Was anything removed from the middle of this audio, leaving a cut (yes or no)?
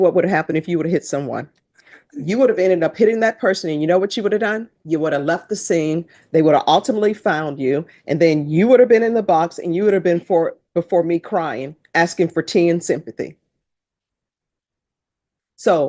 no